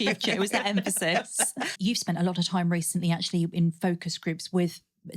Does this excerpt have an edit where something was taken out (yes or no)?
yes